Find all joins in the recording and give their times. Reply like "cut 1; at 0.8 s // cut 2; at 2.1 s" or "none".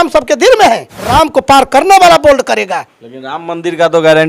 cut 1; at 0.9 s